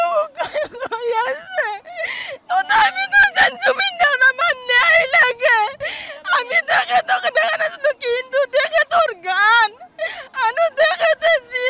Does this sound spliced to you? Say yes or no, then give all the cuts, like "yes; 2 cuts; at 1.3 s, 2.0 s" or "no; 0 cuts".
yes; 1 cut; at 2.2 s